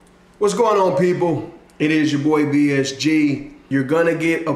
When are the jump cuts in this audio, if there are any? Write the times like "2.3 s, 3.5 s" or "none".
3.7 s